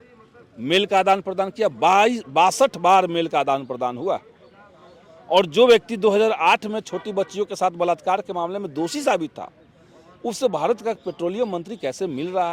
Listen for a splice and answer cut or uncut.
uncut